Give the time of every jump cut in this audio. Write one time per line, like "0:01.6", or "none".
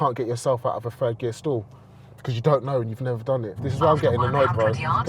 0:03.7